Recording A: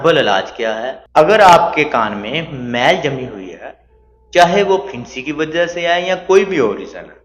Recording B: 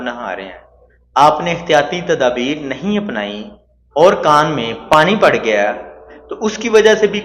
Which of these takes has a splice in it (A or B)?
A